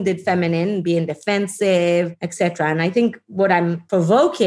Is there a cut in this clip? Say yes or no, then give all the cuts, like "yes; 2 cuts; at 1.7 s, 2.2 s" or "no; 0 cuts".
yes; 2 cuts; at 2.2 s, 3.6 s